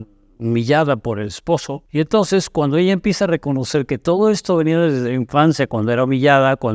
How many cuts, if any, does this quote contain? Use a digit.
1